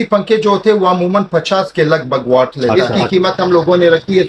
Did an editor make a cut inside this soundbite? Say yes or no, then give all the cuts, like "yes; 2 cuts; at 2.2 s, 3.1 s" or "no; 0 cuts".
yes; 1 cut; at 2.7 s